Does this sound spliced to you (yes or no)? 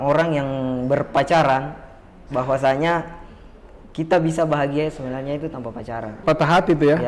yes